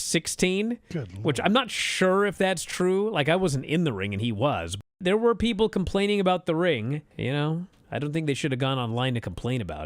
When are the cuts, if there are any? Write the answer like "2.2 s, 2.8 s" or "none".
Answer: 4.8 s, 7.1 s, 7.8 s